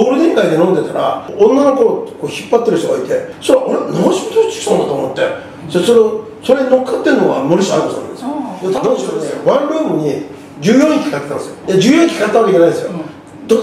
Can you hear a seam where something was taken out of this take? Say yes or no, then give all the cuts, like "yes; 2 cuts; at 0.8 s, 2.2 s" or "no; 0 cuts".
yes; 3 cuts; at 1.2 s, 3.3 s, 8.8 s